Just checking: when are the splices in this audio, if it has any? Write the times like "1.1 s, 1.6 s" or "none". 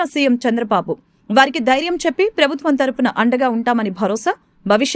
none